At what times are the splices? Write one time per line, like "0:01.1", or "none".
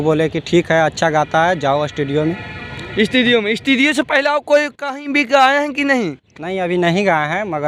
none